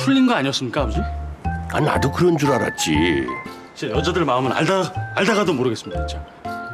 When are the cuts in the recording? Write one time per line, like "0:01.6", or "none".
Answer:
none